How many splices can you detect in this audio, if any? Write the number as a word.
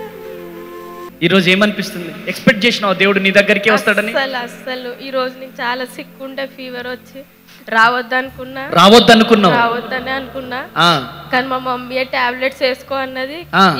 one